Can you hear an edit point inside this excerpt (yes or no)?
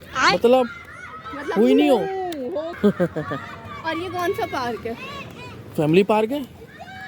yes